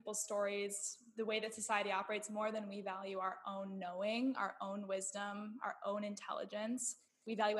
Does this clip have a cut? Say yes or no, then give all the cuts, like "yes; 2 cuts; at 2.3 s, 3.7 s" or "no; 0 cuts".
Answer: no; 0 cuts